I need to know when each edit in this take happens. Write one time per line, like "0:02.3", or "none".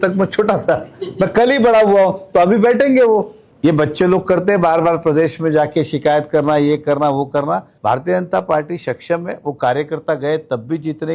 0:03.4
0:07.7